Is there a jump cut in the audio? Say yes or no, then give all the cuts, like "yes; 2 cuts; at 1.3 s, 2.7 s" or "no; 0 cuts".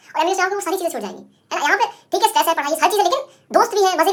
no; 0 cuts